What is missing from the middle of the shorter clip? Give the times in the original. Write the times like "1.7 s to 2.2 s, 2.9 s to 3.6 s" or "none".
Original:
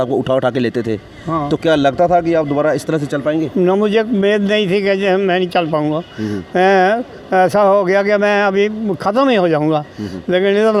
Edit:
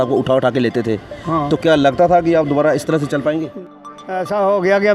3.6 s to 6.8 s

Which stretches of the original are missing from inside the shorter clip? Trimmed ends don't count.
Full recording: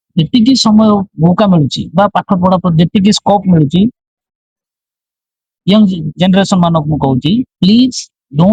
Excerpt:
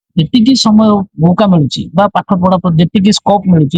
none

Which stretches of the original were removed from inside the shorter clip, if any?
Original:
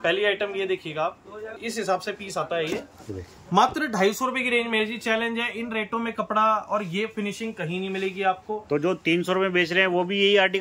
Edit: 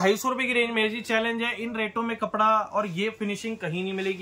none

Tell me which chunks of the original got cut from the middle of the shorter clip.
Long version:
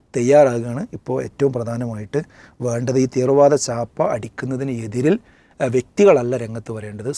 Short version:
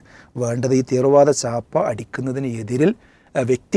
none

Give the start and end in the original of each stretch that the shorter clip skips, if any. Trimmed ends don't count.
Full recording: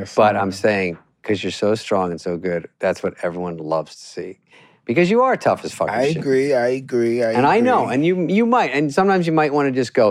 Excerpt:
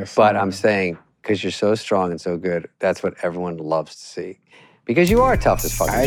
none

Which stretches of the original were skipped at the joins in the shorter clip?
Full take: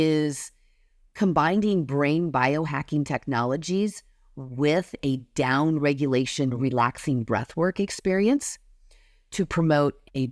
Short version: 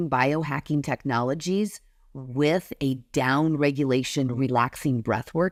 none

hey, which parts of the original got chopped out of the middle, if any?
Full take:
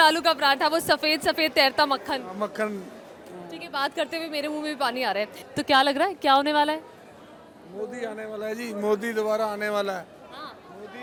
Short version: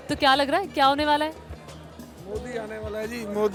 none

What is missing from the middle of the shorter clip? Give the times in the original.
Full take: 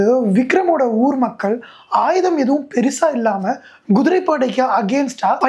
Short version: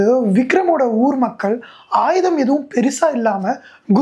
none

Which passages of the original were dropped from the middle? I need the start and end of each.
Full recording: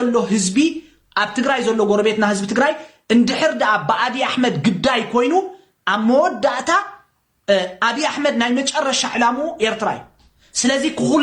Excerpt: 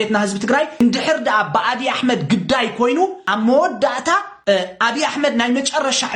2.9 s to 3.1 s, 5.6 s to 5.8 s, 6.9 s to 7.3 s

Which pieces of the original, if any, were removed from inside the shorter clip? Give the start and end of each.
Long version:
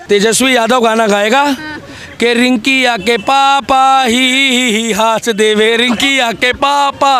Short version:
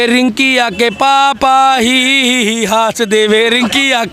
none

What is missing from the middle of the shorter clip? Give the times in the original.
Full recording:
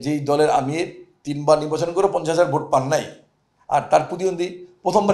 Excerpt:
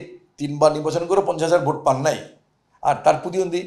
none

